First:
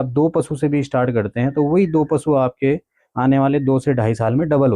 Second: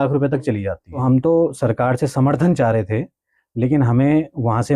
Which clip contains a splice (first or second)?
second